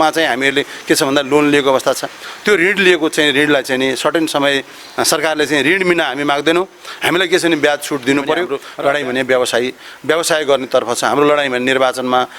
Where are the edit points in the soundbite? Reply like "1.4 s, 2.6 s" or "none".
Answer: 8.6 s